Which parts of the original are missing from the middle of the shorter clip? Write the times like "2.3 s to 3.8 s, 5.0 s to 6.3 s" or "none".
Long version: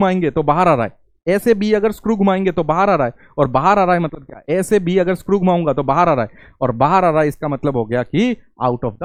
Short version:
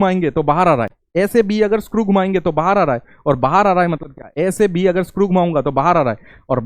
1.0 s to 1.1 s